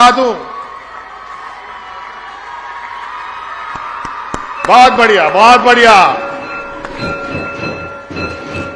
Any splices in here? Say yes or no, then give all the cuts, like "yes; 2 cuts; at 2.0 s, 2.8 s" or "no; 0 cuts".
no; 0 cuts